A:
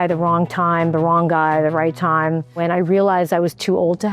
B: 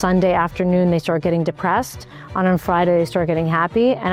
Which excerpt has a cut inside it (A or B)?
A